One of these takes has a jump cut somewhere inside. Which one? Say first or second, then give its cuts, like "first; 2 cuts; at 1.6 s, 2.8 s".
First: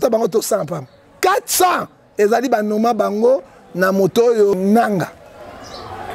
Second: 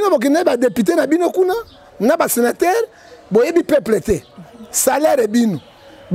first; 2 cuts; at 1.0 s, 4.5 s